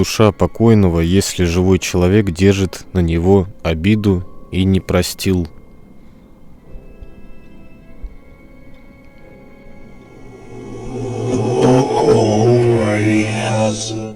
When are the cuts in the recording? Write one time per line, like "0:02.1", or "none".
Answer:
none